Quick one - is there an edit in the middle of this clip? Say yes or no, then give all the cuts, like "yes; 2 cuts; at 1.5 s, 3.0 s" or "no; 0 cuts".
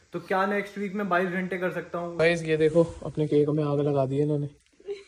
yes; 1 cut; at 2.0 s